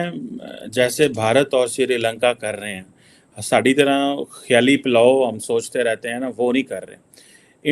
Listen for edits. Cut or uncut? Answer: uncut